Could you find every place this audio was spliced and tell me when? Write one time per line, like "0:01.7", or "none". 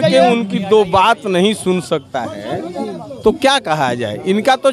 none